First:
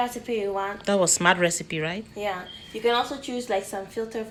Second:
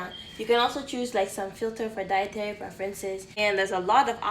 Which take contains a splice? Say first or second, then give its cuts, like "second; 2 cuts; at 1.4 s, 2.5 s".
second; 1 cut; at 3.4 s